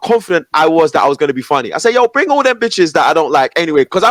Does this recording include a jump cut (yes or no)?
no